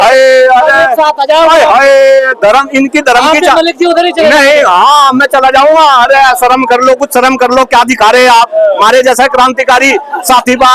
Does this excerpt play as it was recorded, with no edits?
yes; 0 cuts

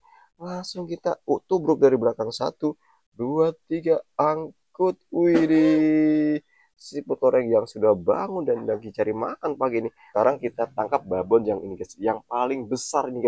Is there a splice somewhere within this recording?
yes; 1 cut; at 10.1 s

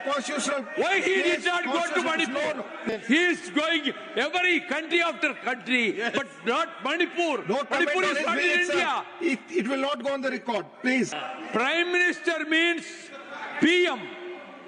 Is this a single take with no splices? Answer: yes; 0 cuts

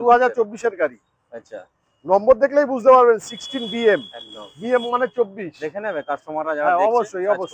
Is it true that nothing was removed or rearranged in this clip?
yes; 0 cuts

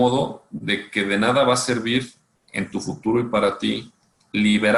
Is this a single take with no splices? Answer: yes; 0 cuts

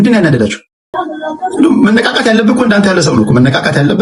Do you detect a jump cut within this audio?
yes; 1 cut; at 1.0 s

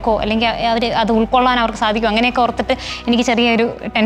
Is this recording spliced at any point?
no; 0 cuts

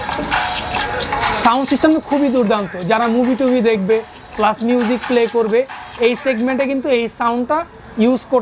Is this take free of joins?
yes; 0 cuts

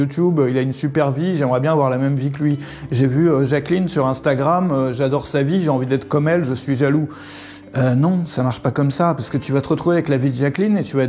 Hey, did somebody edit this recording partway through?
no; 0 cuts

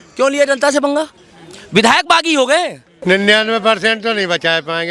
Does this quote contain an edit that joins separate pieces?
yes; 1 cut; at 2.9 s

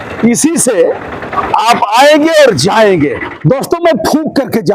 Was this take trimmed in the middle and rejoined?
yes; 1 cut; at 3.3 s

